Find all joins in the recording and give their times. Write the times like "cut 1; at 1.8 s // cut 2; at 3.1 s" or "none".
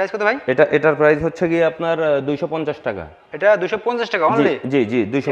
none

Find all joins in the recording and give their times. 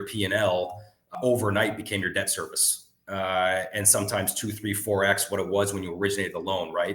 cut 1; at 1.1 s

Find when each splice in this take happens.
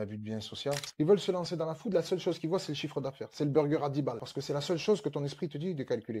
cut 1; at 0.9 s // cut 2; at 4.2 s

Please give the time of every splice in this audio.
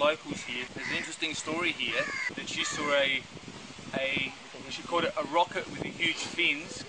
none

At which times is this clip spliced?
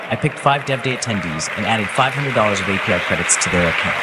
none

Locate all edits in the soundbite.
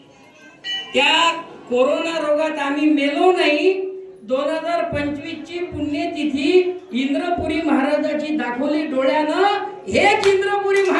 none

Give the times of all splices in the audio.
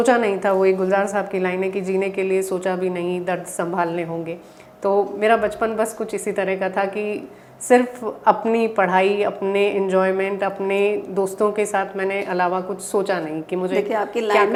none

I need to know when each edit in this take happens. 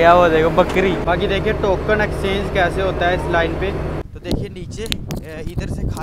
cut 1; at 1.0 s // cut 2; at 4.0 s

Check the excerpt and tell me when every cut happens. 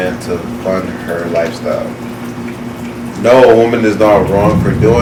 none

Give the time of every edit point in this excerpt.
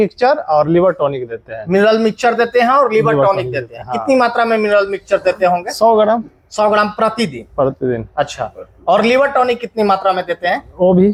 none

